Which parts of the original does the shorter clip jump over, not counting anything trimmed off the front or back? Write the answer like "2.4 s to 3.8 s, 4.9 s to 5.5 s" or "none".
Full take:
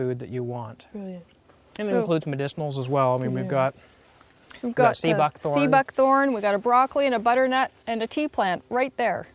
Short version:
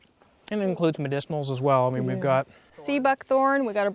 4.0 s to 5.4 s